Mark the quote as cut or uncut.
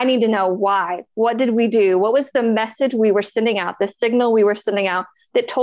uncut